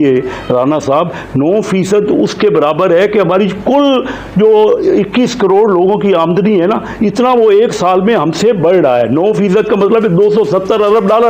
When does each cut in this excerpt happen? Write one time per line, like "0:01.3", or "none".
none